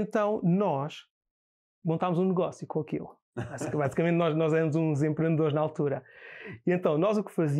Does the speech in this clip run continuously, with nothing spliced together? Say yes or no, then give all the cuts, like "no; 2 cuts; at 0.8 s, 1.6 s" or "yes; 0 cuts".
yes; 0 cuts